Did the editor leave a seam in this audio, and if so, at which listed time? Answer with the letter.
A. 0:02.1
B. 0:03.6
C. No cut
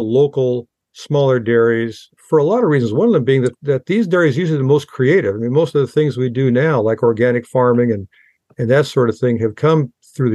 A